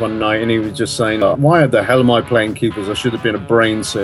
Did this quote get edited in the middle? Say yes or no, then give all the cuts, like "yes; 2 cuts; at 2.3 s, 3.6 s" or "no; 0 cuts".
yes; 1 cut; at 1.2 s